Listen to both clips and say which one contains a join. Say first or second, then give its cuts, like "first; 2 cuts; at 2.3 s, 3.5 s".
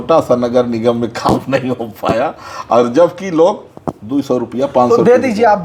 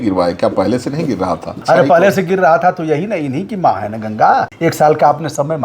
second; 2 cuts; at 1.6 s, 4.5 s